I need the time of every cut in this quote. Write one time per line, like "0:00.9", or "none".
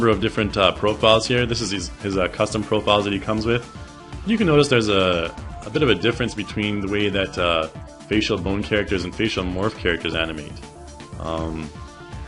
0:09.9